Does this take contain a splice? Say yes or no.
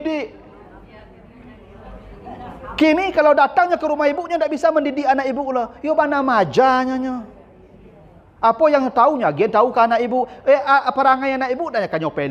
no